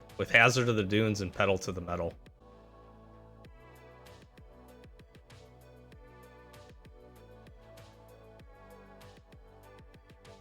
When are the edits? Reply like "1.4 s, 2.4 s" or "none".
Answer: 2.4 s